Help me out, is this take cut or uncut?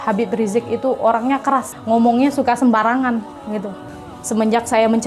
cut